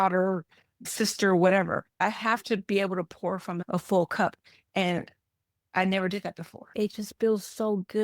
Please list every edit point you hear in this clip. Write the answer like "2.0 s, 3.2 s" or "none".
6.7 s